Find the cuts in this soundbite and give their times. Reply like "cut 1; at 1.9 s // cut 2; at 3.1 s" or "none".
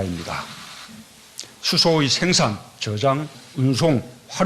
cut 1; at 3.4 s